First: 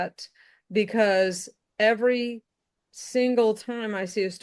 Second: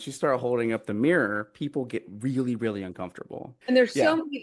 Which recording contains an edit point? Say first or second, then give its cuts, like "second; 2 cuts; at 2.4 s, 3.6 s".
second; 1 cut; at 3.4 s